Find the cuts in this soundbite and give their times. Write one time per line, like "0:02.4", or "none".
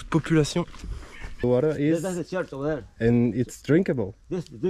0:01.4